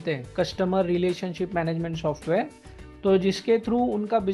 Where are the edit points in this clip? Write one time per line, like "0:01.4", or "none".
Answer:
none

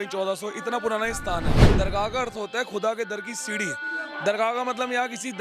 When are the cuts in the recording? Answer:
0:01.7

